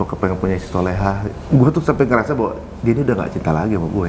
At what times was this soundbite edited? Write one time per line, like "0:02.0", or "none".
0:01.4